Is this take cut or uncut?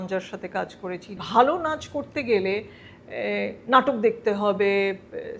cut